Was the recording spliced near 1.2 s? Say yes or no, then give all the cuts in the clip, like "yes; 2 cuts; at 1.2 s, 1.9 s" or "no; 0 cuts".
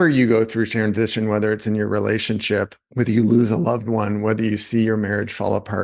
no; 1 cut; at 2.8 s